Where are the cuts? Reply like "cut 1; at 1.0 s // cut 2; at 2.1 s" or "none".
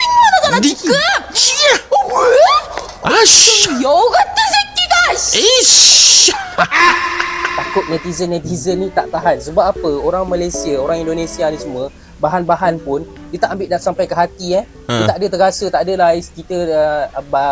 cut 1; at 7.6 s